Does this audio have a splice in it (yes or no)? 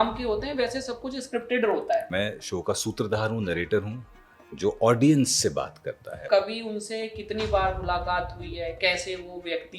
yes